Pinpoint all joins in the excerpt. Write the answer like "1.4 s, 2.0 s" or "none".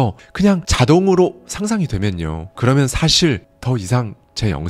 none